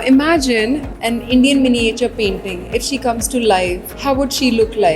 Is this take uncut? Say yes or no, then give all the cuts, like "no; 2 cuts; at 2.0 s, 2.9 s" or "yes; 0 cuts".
no; 2 cuts; at 0.9 s, 3.9 s